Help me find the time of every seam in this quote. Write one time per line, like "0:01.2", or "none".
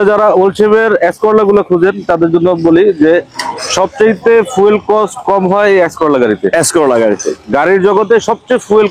none